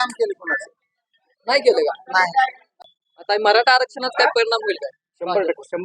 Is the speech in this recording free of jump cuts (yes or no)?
no